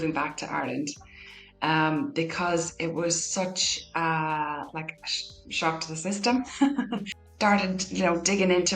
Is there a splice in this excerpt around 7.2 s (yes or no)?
yes